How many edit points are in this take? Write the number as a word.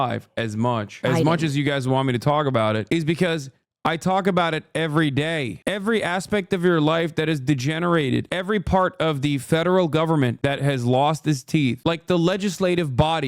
two